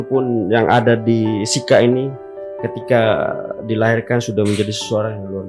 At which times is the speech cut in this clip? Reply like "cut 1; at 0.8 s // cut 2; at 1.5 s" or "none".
none